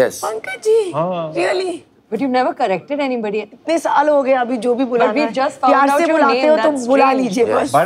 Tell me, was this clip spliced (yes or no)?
yes